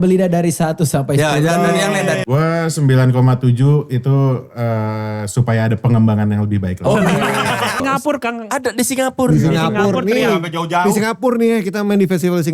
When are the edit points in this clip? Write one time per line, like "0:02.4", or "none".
0:02.2
0:07.8